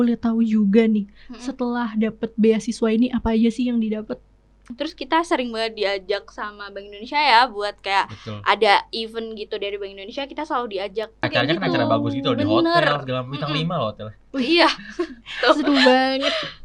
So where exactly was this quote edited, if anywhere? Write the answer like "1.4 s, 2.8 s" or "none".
4.7 s, 11.2 s